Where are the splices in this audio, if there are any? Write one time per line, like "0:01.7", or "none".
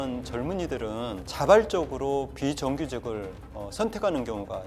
0:01.3